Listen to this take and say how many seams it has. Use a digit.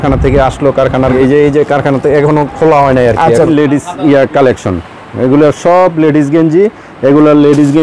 2